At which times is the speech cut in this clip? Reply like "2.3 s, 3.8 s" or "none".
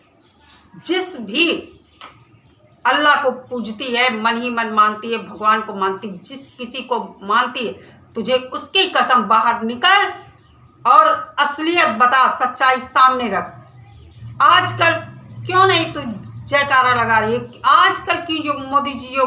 none